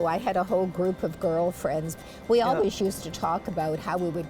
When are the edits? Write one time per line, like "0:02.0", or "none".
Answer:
0:02.0